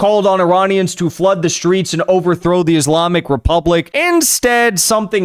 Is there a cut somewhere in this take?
yes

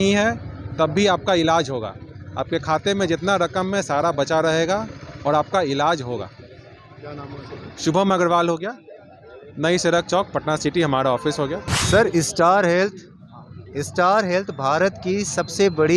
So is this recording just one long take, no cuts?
yes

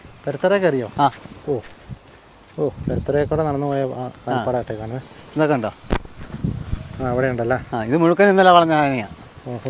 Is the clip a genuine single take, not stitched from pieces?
yes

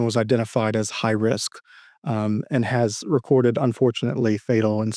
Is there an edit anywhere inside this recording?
no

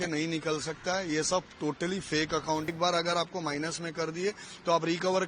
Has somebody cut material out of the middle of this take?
yes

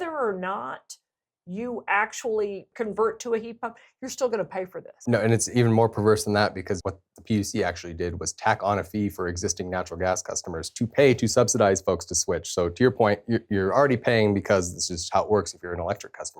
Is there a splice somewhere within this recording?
yes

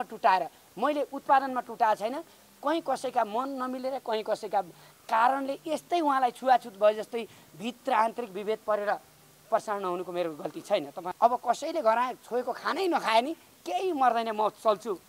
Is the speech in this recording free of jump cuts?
no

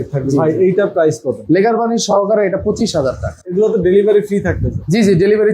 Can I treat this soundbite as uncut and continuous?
no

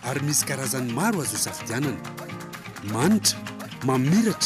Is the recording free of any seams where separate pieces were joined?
yes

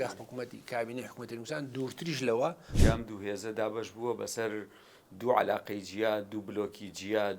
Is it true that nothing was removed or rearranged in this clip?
no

